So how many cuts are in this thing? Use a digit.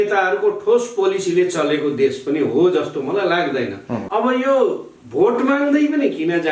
1